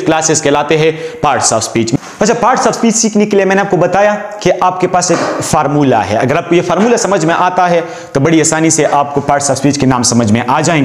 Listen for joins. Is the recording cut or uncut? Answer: cut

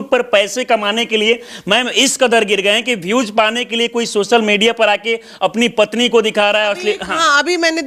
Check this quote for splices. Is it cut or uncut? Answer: uncut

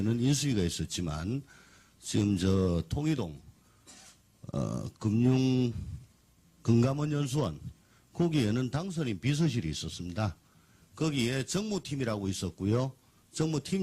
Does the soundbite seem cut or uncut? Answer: cut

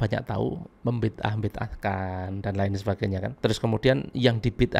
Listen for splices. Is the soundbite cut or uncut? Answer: cut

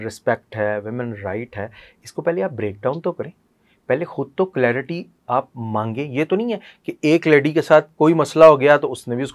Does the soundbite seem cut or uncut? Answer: uncut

